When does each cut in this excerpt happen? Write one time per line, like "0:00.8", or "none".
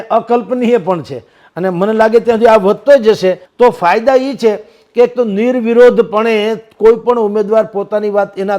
0:03.4